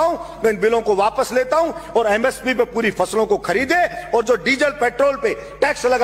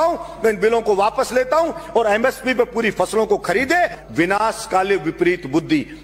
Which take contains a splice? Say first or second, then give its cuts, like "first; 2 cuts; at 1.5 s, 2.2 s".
second; 1 cut; at 4.0 s